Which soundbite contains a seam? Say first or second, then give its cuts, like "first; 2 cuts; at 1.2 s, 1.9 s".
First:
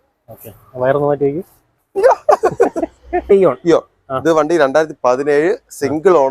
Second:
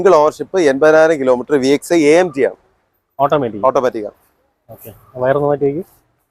first; 1 cut; at 3.3 s